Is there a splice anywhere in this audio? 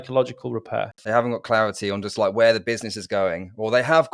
yes; 1 cut; at 0.9 s

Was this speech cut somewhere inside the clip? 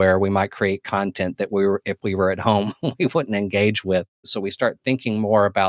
yes; 1 cut; at 4.3 s

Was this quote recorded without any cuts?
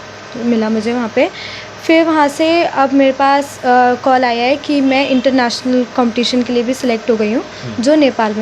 yes; 0 cuts

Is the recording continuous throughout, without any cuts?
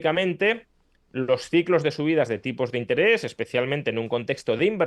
yes; 0 cuts

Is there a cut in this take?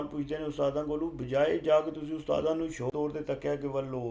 yes; 1 cut; at 3.0 s

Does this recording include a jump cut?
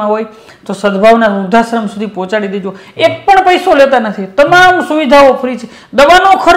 no; 0 cuts

